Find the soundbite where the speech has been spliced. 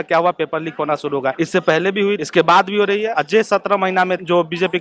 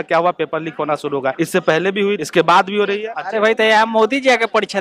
second; 1 cut; at 3.1 s

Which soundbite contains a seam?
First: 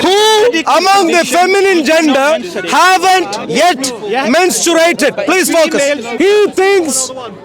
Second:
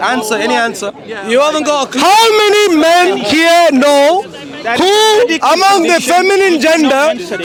first; 1 cut; at 6.1 s

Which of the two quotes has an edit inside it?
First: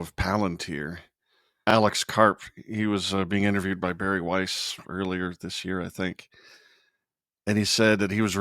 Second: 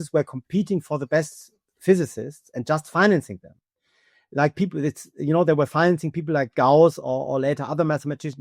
first; 1 cut; at 1.7 s

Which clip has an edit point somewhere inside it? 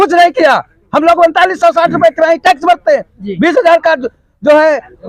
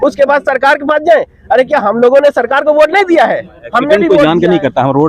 second; 1 cut; at 4.1 s

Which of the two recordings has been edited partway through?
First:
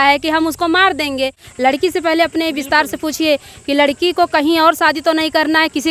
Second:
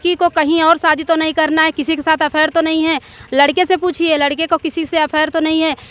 first; 1 cut; at 1.4 s

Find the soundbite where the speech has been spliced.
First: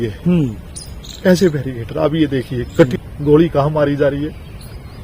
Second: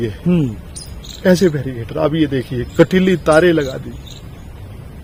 first; 1 cut; at 2.9 s

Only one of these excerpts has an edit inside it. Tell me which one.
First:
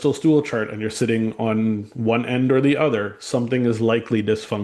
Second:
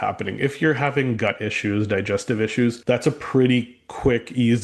second; 1 cut; at 2.8 s

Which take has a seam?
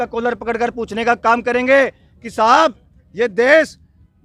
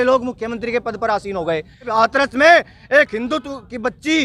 second; 1 cut; at 1.9 s

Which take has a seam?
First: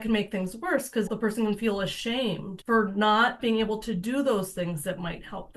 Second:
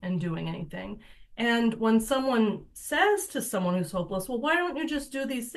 first; 3 cuts; at 1.1 s, 2.5 s, 3.4 s

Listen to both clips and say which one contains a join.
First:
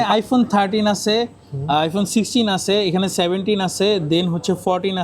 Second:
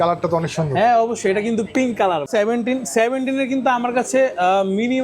second; 1 cut; at 2.3 s

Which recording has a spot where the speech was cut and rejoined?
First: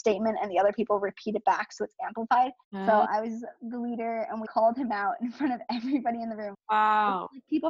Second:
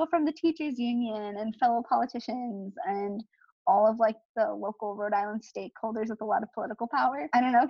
first; 3 cuts; at 2.7 s, 4.4 s, 6.6 s

